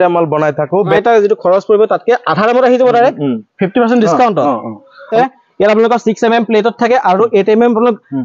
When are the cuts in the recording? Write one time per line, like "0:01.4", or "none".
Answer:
0:00.9
0:05.1